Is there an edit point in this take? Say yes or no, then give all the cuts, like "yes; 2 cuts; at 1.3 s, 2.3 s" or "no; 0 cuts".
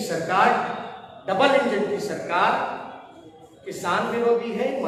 no; 0 cuts